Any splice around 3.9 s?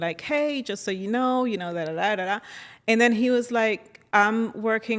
yes; 1 cut; at 3.9 s

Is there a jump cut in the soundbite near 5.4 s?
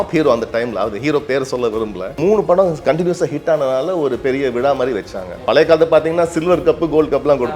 yes; 2 cuts; at 2.2 s, 5.4 s

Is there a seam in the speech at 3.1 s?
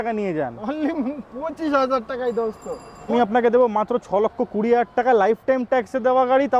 yes; 1 cut; at 3.1 s

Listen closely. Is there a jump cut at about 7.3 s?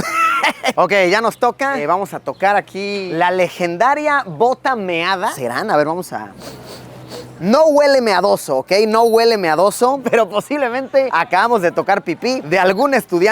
no; 5 cuts; at 0.7 s, 1.8 s, 3.1 s, 5.3 s, 10.0 s

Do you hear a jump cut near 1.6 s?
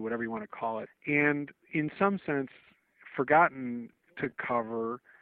yes; 2 cuts; at 0.9 s, 1.6 s

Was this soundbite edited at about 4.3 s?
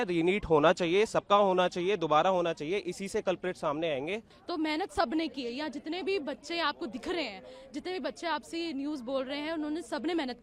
yes; 1 cut; at 4.3 s

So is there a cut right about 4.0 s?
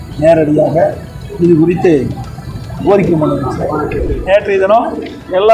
yes; 1 cut; at 4.0 s

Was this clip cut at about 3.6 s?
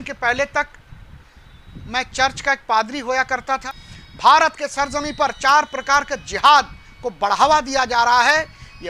yes; 1 cut; at 3.6 s

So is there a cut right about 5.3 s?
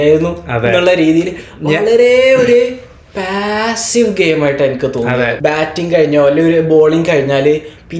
yes; 1 cut; at 5.3 s

